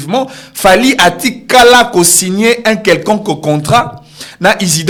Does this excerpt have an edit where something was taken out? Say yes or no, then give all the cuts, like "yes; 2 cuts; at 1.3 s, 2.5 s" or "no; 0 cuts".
no; 0 cuts